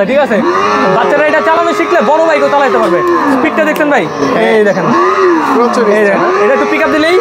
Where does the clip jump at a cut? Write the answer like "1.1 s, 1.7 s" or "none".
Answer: none